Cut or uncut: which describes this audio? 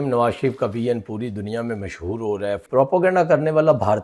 cut